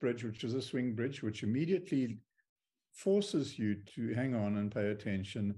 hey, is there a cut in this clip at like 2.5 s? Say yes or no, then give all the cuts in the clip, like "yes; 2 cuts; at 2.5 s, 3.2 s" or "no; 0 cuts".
no; 1 cut; at 3.9 s